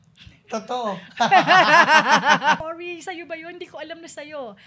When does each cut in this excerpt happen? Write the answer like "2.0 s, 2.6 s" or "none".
2.6 s